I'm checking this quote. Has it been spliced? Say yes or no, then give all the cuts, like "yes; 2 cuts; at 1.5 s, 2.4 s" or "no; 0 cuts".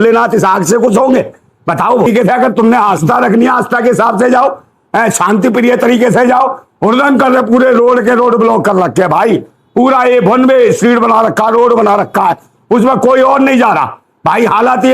yes; 1 cut; at 2.1 s